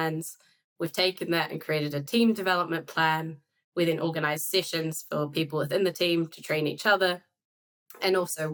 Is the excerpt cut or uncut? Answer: uncut